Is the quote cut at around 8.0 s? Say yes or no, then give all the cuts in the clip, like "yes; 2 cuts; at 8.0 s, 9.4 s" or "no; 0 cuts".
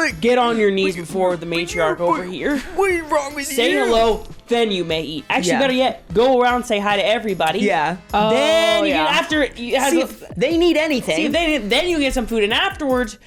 no; 0 cuts